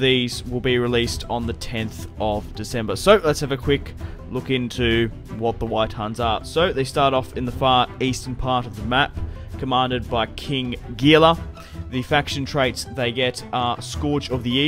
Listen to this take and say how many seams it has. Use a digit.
0